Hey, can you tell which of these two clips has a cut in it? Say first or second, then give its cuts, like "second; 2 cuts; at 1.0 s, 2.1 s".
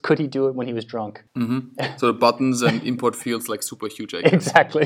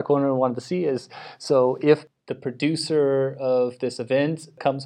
first; 1 cut; at 1.2 s